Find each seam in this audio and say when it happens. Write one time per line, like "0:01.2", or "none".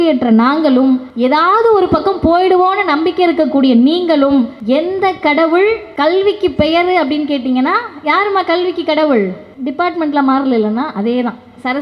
0:01.1
0:04.6
0:05.9
0:09.5